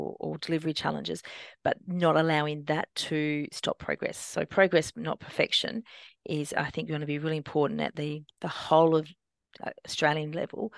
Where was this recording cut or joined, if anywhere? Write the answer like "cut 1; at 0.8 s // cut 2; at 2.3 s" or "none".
none

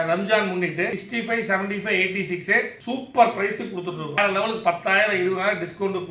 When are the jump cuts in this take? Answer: cut 1; at 1.0 s // cut 2; at 2.8 s // cut 3; at 4.2 s

